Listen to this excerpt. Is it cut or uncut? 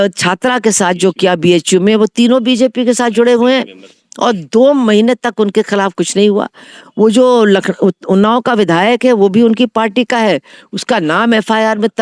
uncut